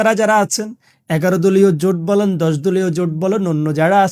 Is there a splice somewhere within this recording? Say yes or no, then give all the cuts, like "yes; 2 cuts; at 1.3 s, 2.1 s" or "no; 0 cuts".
no; 0 cuts